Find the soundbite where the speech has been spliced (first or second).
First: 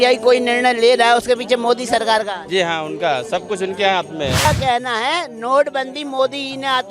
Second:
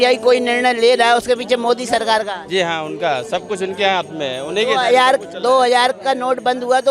first